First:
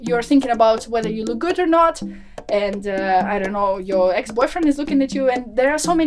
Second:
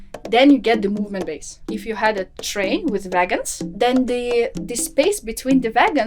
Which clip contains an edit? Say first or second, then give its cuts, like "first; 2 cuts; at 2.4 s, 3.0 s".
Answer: second; 2 cuts; at 1.7 s, 3.6 s